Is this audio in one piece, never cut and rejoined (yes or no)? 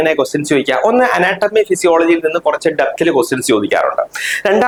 yes